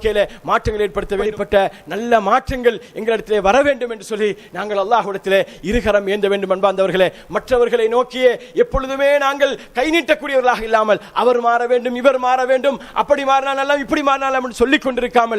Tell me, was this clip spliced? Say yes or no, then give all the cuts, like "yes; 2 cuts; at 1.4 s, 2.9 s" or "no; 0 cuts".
yes; 1 cut; at 1.3 s